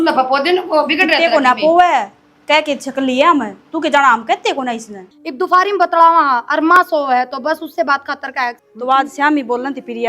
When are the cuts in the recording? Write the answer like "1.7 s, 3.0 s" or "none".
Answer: 5.1 s, 8.6 s